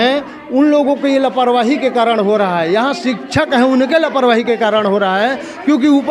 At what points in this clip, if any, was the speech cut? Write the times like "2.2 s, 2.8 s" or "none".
none

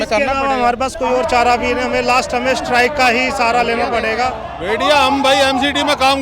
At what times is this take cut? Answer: 4.5 s

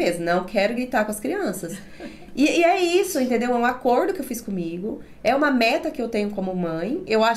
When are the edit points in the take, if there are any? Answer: none

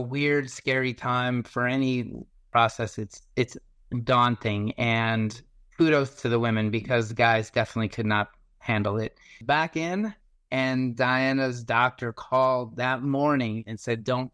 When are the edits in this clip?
2.5 s, 9.4 s

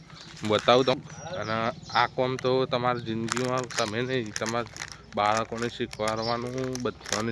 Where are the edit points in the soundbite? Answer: 1.0 s

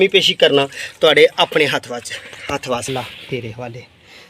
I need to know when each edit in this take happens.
2.9 s

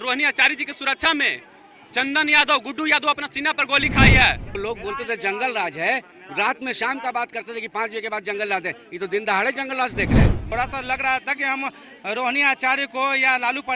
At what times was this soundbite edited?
4.6 s, 10.4 s

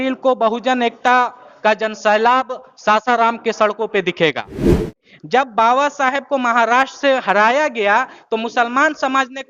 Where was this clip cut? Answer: 4.8 s

